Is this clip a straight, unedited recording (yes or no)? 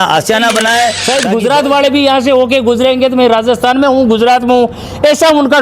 no